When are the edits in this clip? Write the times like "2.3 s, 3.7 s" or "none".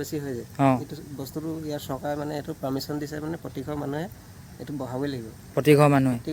none